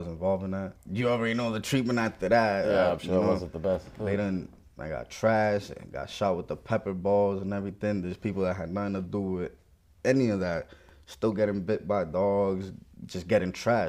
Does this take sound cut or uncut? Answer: uncut